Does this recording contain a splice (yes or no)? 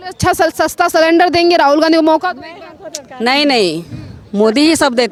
no